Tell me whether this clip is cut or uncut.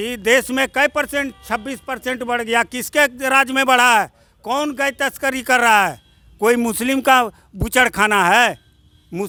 uncut